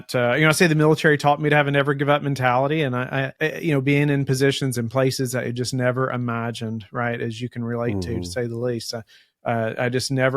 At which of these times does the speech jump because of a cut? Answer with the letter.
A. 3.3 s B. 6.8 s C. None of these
A